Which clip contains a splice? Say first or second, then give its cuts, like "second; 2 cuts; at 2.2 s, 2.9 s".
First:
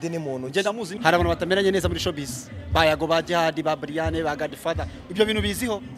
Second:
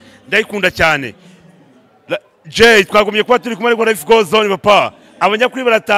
first; 1 cut; at 0.9 s